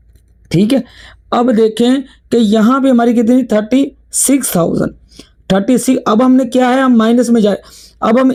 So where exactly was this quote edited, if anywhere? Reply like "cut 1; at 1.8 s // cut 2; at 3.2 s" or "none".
none